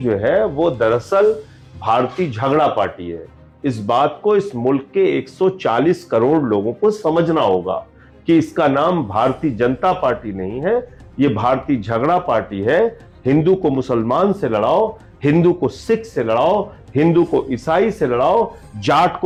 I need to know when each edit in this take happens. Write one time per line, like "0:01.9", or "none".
none